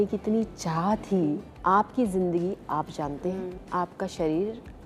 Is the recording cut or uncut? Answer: cut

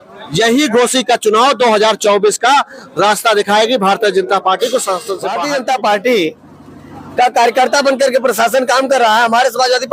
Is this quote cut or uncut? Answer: cut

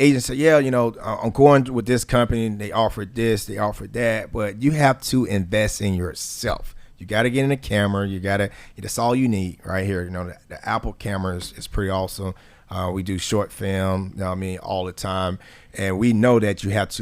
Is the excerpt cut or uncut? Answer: uncut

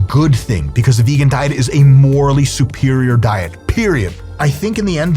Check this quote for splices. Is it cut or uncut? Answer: cut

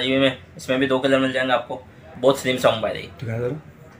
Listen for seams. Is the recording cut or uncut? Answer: cut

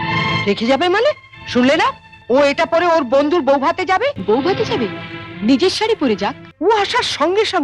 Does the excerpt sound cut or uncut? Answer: cut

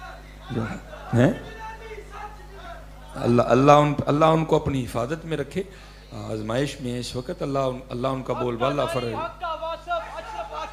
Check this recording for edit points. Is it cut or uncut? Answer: uncut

